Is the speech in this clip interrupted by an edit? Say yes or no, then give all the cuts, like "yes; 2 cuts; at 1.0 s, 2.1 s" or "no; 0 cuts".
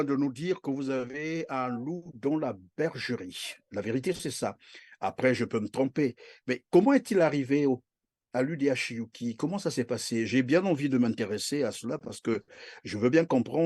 no; 0 cuts